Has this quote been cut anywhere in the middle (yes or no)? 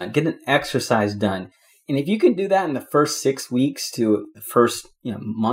no